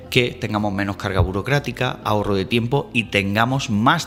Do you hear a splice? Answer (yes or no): no